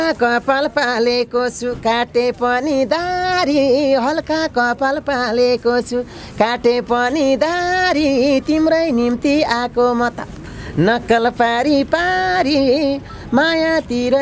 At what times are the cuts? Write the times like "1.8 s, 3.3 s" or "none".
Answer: none